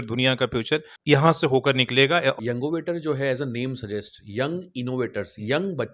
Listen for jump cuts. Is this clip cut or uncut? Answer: cut